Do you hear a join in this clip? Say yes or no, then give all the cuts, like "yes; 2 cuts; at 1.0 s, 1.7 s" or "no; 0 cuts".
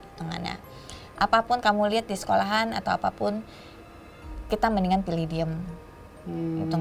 no; 0 cuts